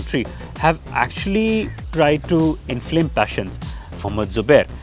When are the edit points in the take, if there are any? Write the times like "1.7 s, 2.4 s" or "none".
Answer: 1.8 s, 3.9 s

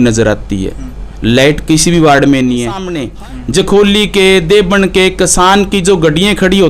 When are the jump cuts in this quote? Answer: 3.1 s

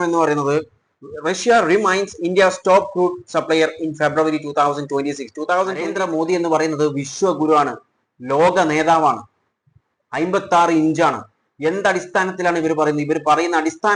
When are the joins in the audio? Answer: 5.9 s

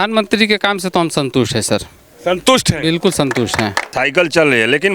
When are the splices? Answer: 3.9 s

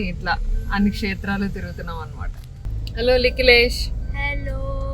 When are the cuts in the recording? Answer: 2.7 s

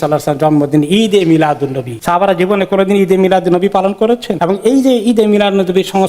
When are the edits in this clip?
1.9 s, 4.3 s

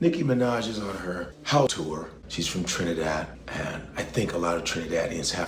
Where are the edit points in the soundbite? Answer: 1.9 s

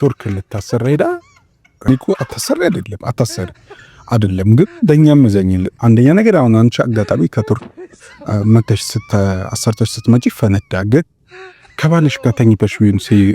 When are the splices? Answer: 1.9 s

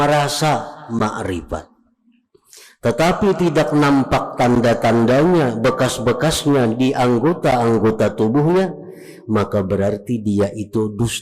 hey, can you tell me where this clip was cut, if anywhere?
none

